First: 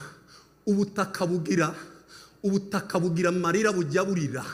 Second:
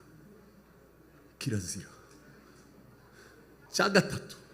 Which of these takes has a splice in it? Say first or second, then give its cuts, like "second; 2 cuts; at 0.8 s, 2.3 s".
second; 1 cut; at 3.6 s